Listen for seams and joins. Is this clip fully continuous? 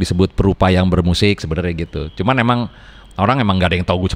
yes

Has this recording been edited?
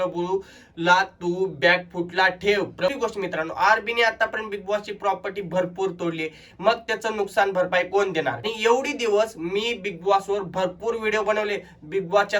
yes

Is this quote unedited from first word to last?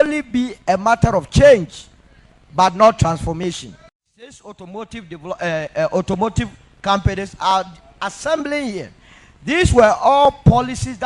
no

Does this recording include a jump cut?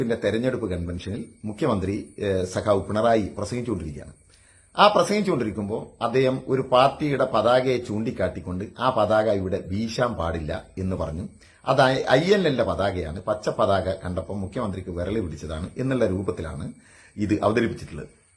no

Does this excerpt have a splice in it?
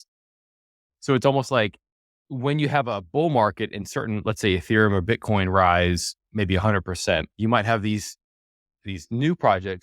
yes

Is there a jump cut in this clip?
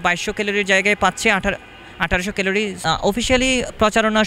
yes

